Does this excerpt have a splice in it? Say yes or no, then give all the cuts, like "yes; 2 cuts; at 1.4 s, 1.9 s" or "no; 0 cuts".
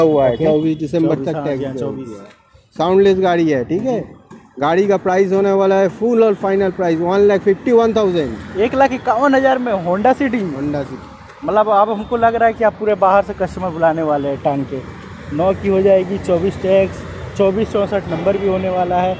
no; 0 cuts